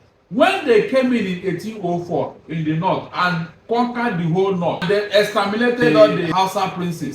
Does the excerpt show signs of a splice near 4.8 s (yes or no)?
yes